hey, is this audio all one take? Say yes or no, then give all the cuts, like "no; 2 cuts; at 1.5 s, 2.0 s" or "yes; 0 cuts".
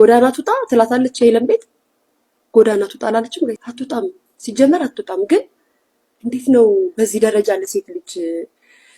no; 1 cut; at 3.7 s